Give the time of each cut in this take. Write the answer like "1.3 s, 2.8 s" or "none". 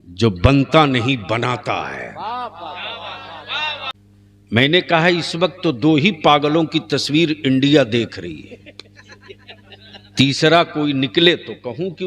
3.9 s